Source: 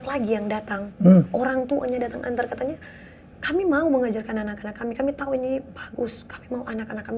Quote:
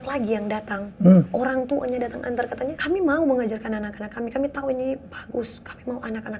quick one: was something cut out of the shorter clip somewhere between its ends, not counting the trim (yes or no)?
yes